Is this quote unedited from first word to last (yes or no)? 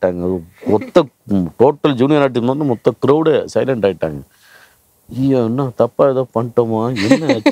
yes